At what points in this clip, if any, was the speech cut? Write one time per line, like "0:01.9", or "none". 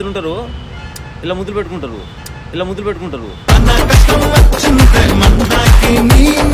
none